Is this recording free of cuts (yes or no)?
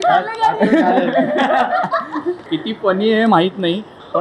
no